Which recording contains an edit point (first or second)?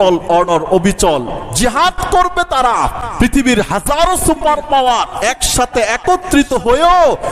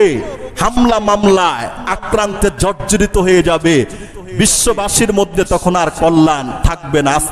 first